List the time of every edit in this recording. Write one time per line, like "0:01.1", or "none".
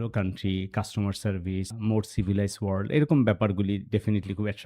0:01.7